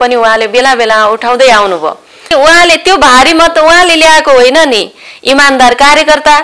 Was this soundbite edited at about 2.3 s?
yes; 1 cut; at 2.3 s

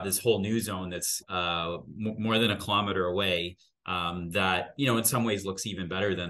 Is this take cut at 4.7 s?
no; 1 cut; at 1.2 s

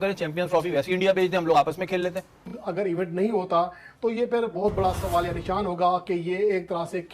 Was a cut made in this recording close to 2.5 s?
yes; 1 cut; at 2.5 s

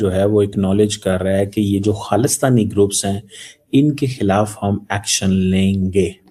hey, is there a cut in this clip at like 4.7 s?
no; 0 cuts

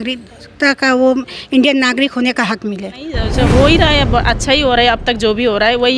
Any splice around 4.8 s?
no; 1 cut; at 3.2 s

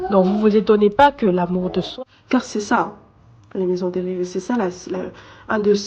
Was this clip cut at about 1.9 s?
yes; 1 cut; at 1.9 s

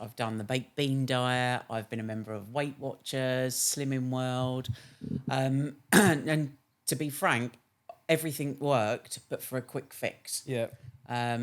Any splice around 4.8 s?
no; 0 cuts

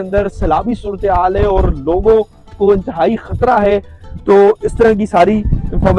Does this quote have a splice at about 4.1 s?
no; 0 cuts

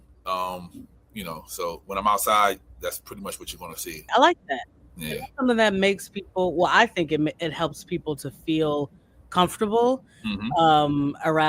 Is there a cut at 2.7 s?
no; 1 cut; at 4.0 s

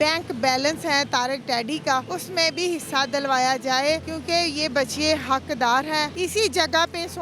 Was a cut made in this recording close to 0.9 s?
no; 3 cuts; at 2.2 s, 4.1 s, 6.1 s

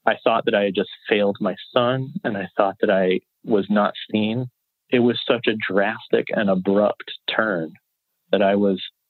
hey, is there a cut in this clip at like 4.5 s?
yes; 1 cut; at 4.5 s

